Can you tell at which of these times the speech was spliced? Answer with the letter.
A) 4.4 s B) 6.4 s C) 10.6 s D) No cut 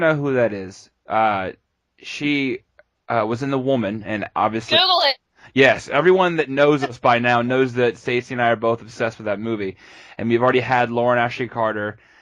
B